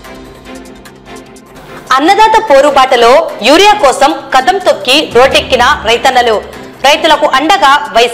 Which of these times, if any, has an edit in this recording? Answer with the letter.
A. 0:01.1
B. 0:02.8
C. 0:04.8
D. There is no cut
A